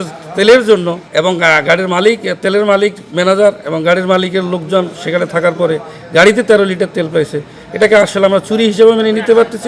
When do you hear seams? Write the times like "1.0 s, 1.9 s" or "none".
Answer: 1.0 s